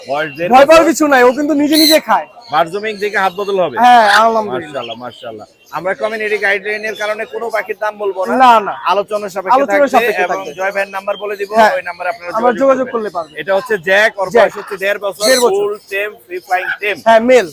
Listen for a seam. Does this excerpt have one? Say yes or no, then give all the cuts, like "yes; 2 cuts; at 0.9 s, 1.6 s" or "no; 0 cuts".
no; 0 cuts